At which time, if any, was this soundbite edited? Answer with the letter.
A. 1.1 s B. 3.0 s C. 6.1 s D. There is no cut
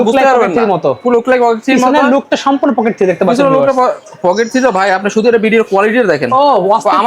D